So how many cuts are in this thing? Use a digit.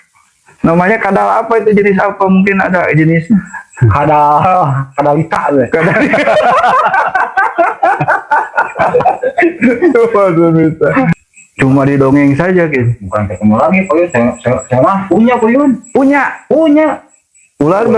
1